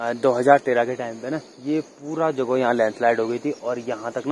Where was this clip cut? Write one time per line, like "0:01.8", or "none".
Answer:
none